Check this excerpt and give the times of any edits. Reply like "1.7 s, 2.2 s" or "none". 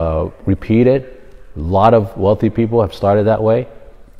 none